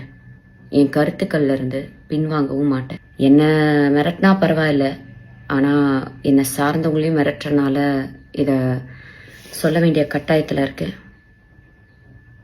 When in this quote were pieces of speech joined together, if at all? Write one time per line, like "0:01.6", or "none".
0:03.0